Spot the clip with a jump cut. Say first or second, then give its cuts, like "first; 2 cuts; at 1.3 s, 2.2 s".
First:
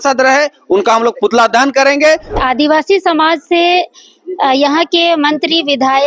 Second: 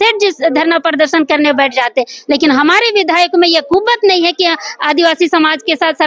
first; 1 cut; at 2.4 s